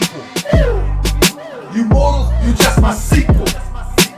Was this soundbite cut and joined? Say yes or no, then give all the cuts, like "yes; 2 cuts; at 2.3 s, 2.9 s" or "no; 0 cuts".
yes; 1 cut; at 3.2 s